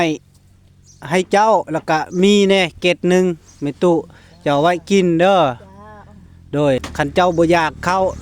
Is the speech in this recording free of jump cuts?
no; 1 cut; at 6.8 s

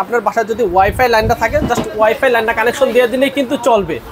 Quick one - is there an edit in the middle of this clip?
no; 0 cuts

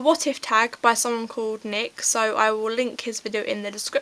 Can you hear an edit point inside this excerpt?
no; 0 cuts

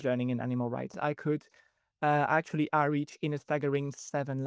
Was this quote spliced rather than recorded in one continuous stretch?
yes; 1 cut; at 1.0 s

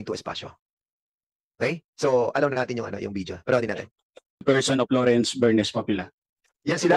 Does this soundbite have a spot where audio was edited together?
yes; 1 cut; at 4.4 s

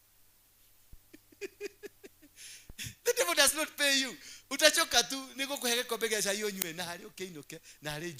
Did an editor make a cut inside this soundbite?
no; 0 cuts

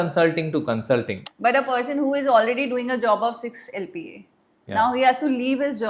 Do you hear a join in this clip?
yes; 1 cut; at 1.2 s

